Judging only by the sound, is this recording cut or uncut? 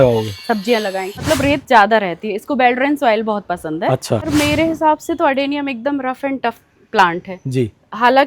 cut